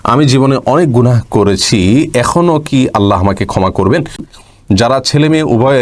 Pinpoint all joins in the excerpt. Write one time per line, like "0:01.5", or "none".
0:04.3